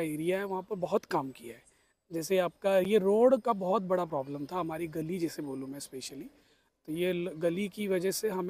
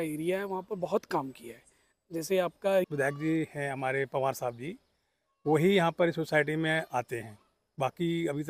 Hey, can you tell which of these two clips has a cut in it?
second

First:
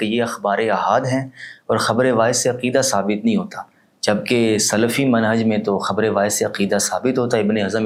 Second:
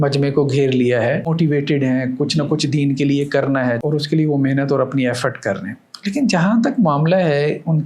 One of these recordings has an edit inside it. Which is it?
second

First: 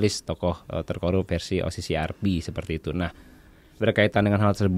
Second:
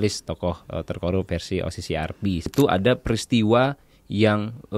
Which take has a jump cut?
second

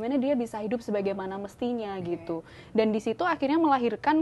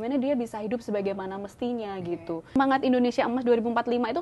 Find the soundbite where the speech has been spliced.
second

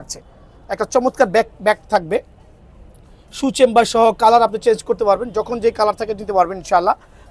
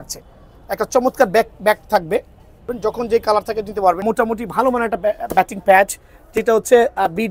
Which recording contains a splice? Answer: second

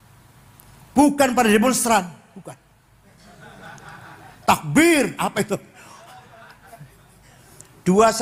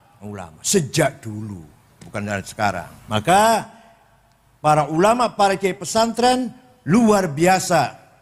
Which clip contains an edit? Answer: second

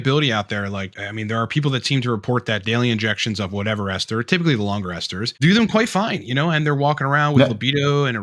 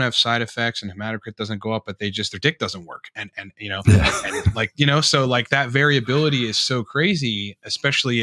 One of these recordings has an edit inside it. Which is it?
first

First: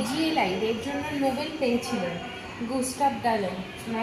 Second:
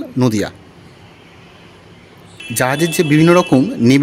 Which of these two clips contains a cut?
second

